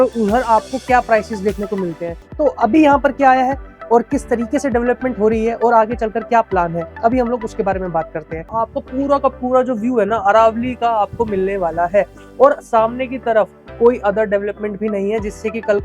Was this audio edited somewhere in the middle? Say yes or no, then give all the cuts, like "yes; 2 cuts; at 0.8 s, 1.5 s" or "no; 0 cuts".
yes; 2 cuts; at 2.2 s, 8.5 s